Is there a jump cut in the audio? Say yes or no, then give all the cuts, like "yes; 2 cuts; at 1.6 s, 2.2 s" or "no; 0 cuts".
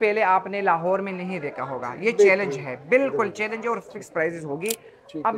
no; 0 cuts